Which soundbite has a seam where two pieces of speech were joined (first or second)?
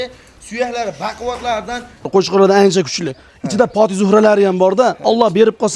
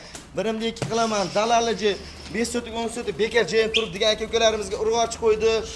first